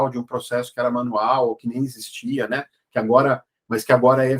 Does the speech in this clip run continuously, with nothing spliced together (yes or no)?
yes